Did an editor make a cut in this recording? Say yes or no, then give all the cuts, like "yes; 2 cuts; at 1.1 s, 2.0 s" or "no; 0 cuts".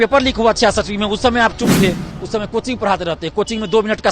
yes; 1 cut; at 2.1 s